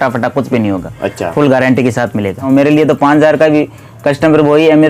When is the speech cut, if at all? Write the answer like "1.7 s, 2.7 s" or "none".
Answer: 2.5 s